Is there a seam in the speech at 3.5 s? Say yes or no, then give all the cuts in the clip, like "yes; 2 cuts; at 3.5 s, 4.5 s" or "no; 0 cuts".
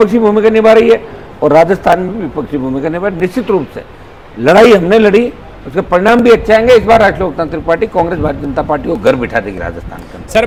no; 0 cuts